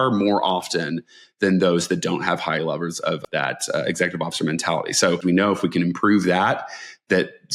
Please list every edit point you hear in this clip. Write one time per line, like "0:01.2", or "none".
0:03.3
0:05.2

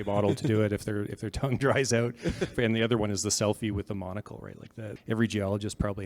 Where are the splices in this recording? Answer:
0:02.5
0:04.8

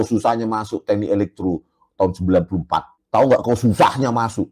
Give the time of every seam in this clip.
0:03.0

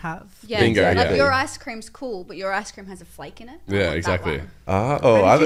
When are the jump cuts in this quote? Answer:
none

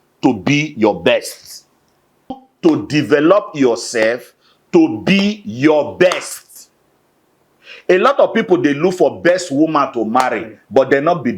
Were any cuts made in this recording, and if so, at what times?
0:02.5

